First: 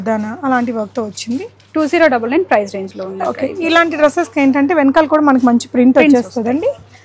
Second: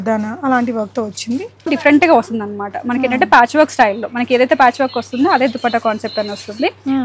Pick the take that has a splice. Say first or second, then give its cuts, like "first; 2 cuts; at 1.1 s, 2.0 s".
second; 1 cut; at 1.7 s